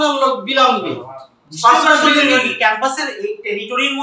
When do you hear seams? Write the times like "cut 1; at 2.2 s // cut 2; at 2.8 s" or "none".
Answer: none